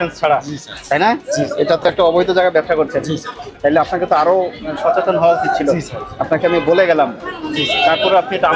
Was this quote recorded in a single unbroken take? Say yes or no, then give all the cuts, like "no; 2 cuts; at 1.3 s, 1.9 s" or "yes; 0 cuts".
yes; 0 cuts